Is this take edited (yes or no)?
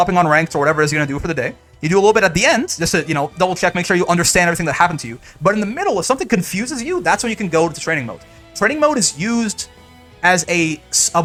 no